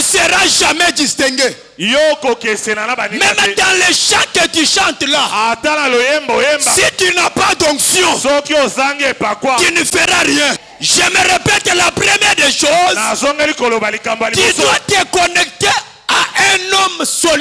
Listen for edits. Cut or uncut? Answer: cut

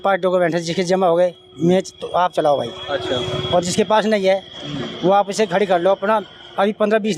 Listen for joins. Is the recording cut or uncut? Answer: uncut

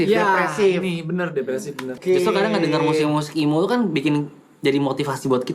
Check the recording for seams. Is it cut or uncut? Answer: cut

